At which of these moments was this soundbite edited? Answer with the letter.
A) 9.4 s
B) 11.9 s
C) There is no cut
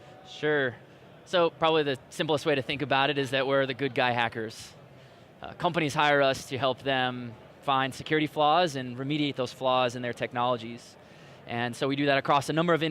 B